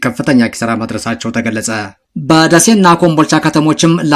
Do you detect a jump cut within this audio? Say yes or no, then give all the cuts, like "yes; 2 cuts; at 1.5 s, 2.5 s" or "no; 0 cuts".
yes; 1 cut; at 2.0 s